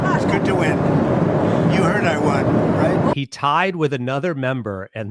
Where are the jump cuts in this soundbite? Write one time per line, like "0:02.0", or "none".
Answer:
0:03.1